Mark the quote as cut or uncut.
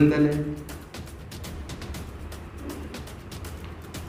uncut